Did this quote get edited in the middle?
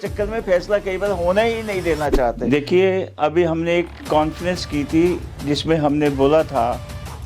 yes; 1 cut; at 2.4 s

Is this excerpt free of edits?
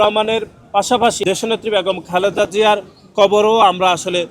no; 1 cut; at 1.2 s

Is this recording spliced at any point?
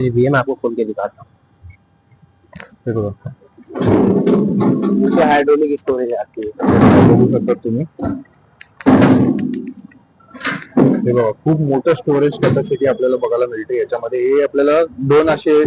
no; 0 cuts

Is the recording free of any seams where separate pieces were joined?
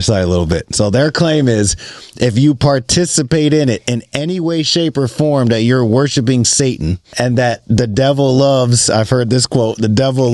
no; 1 cut; at 7.0 s

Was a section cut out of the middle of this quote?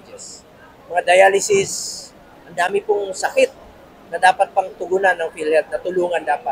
no; 0 cuts

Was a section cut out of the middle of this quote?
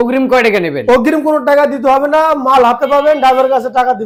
no; 0 cuts

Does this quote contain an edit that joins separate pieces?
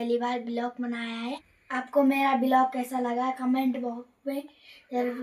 yes; 1 cut; at 1.5 s

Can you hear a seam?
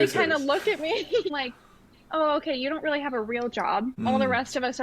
yes; 2 cuts; at 1.3 s, 4.1 s

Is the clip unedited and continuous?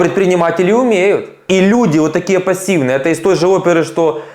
no; 1 cut; at 1.3 s

